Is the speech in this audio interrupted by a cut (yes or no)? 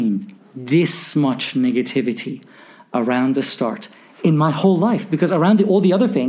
no